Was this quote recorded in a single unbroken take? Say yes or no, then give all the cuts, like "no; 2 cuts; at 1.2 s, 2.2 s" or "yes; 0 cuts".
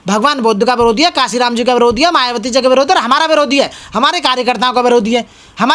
yes; 0 cuts